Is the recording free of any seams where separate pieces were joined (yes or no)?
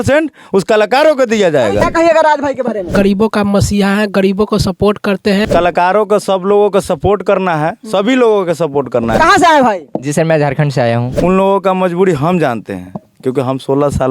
no